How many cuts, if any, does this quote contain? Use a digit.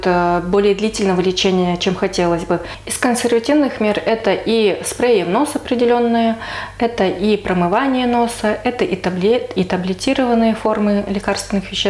1